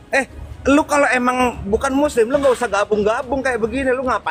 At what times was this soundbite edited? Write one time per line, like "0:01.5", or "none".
none